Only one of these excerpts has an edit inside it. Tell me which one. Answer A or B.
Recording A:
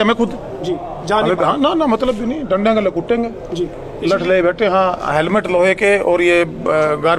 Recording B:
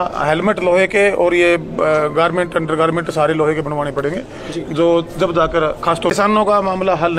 B